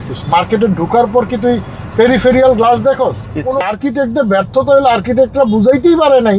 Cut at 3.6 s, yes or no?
yes